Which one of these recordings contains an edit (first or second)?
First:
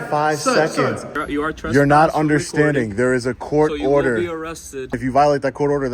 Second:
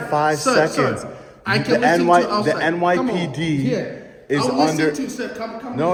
first